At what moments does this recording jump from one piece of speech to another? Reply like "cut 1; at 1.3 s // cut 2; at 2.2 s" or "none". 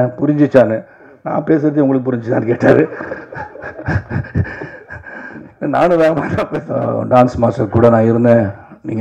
cut 1; at 6.5 s

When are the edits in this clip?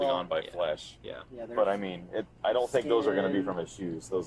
none

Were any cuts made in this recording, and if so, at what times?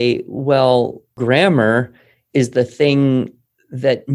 cut 1; at 1.1 s

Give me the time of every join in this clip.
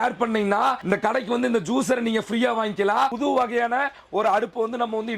cut 1; at 3.1 s

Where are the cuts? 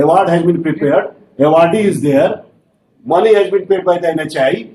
none

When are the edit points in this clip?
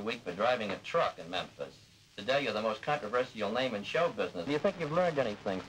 cut 1; at 4.5 s

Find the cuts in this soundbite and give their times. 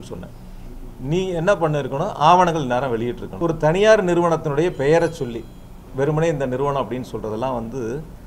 cut 1; at 3.2 s

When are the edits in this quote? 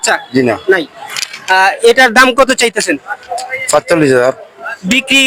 none

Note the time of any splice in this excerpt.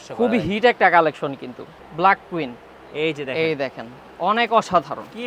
cut 1; at 1.7 s

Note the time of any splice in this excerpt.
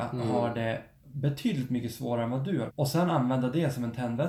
cut 1; at 2.7 s

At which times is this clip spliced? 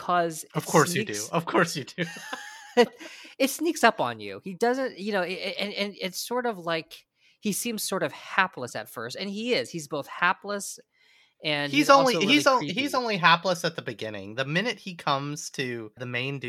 none

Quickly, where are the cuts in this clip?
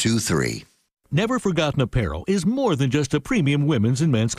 cut 1; at 0.9 s

